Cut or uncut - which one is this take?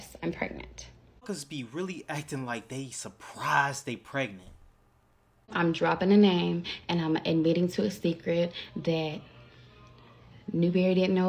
cut